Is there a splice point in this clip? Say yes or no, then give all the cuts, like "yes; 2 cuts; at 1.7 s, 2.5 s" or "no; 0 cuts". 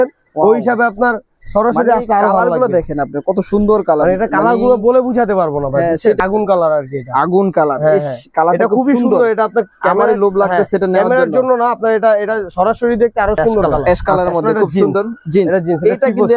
yes; 2 cuts; at 6.2 s, 13.7 s